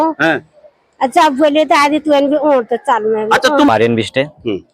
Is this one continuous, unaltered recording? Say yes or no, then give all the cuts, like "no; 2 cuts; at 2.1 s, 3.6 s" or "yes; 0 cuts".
no; 1 cut; at 3.7 s